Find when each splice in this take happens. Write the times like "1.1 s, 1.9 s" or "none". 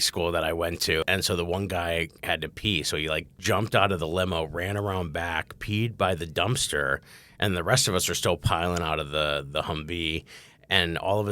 1.0 s, 3.3 s